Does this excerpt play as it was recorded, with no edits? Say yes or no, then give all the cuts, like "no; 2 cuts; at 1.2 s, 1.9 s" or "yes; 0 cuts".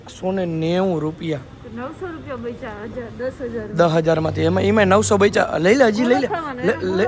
no; 1 cut; at 4.3 s